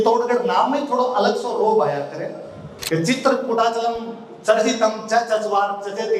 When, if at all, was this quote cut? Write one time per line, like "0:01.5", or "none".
0:02.7